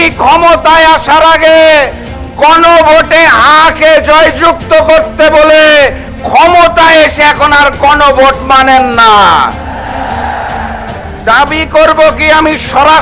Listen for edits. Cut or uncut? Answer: uncut